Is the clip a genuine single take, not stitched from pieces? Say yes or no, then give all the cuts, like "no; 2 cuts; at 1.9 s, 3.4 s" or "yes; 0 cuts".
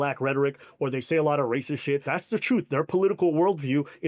no; 1 cut; at 2.1 s